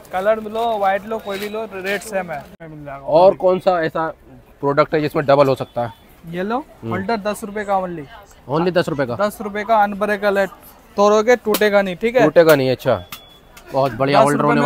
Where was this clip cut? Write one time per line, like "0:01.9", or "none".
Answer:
0:02.5